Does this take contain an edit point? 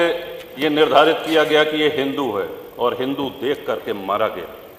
no; 0 cuts

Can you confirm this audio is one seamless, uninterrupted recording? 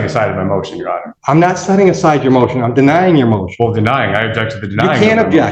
no; 1 cut; at 1.1 s

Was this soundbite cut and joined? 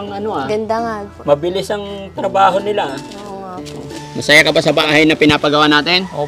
yes; 2 cuts; at 3.8 s, 4.8 s

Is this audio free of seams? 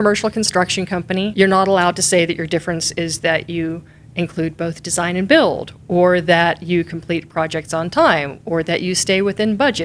no; 1 cut; at 1.3 s

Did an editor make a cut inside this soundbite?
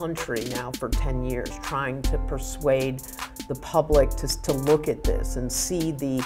no; 0 cuts

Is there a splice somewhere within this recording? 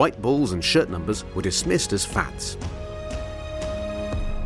yes; 1 cut; at 2.3 s

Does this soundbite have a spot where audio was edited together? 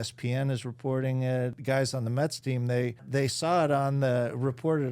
yes; 2 cuts; at 1.6 s, 3.1 s

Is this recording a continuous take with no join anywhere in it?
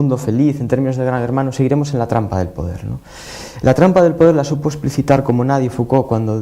yes; 0 cuts

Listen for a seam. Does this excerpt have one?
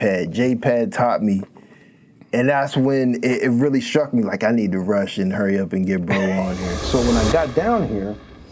yes; 1 cut; at 6.8 s

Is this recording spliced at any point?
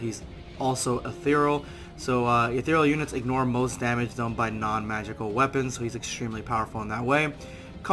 no; 0 cuts

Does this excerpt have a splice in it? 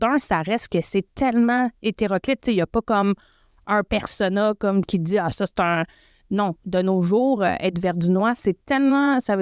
no; 0 cuts

